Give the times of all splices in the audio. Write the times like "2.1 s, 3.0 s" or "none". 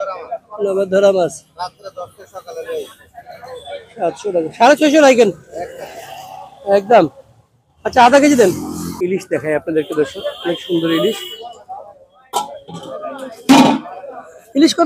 8.9 s